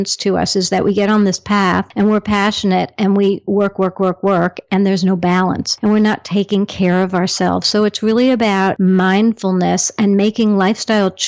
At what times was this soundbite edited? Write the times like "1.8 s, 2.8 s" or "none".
1.9 s, 5.7 s, 8.8 s